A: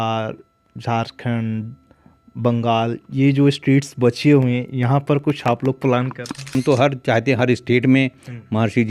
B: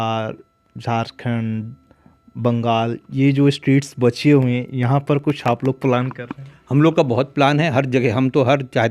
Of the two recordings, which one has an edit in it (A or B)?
A